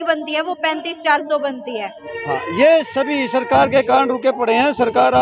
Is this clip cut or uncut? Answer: cut